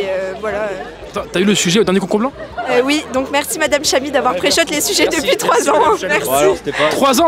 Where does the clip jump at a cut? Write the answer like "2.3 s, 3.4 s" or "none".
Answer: none